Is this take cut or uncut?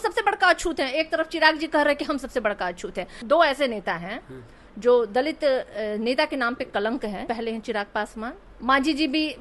cut